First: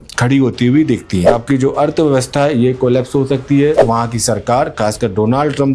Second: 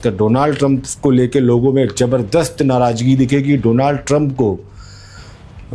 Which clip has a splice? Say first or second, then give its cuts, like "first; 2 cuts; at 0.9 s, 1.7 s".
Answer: first; 2 cuts; at 1.3 s, 3.8 s